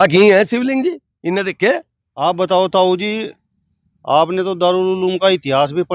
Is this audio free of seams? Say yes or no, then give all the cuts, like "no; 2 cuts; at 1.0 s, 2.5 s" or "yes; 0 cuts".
yes; 0 cuts